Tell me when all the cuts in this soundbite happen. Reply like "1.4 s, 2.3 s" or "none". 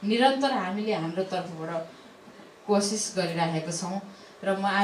none